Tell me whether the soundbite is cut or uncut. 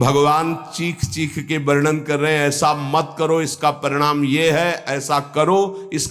uncut